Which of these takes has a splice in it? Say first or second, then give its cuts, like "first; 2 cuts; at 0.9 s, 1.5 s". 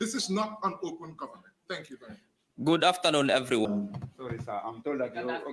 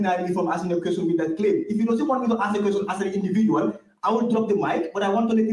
first; 1 cut; at 3.7 s